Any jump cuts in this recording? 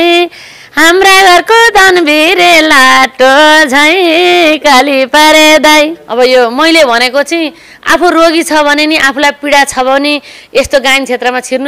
yes; 1 cut; at 6.0 s

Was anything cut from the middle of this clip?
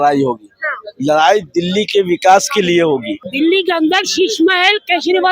yes; 1 cut; at 3.2 s

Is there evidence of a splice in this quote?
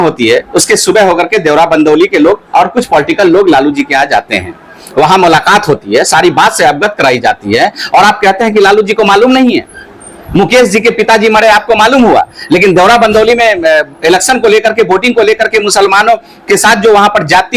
no; 0 cuts

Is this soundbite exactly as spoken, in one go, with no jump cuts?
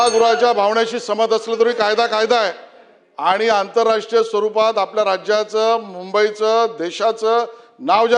yes; 0 cuts

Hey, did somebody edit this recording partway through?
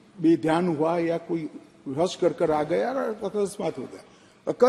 no; 0 cuts

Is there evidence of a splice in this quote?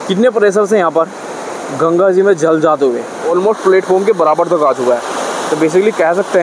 yes; 1 cut; at 3.2 s

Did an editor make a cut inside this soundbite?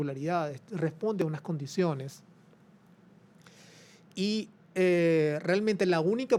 no; 0 cuts

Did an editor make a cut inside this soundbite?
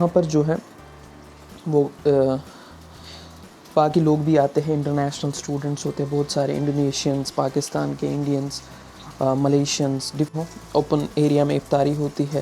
yes; 1 cut; at 10.3 s

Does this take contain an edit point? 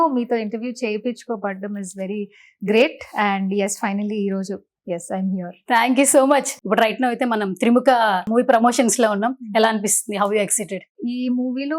yes; 3 cuts; at 6.6 s, 8.3 s, 10.9 s

